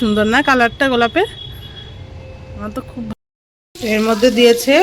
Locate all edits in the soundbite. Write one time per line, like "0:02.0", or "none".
0:03.1